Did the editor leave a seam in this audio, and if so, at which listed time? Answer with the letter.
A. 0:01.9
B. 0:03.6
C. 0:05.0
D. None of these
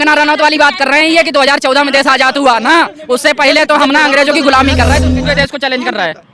C